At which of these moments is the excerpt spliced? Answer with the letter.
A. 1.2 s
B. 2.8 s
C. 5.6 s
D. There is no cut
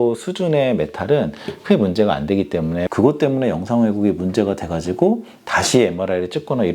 B